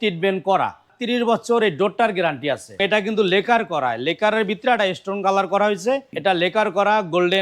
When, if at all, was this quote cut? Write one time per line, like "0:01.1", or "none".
0:00.9
0:02.8
0:06.1